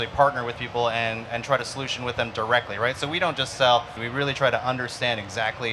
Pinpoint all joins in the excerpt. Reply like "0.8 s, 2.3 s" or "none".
3.9 s